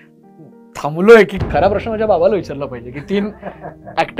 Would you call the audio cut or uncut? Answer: cut